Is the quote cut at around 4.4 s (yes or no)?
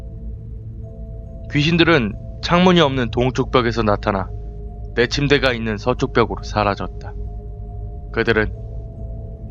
yes